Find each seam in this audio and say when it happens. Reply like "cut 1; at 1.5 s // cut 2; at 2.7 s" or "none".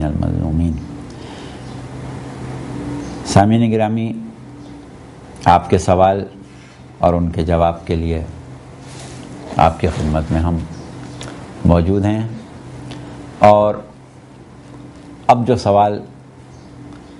none